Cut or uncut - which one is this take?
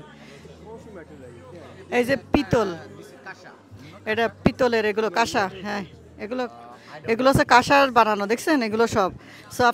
uncut